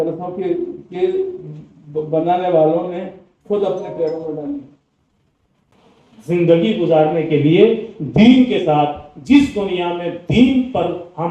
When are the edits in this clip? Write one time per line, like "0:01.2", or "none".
0:05.7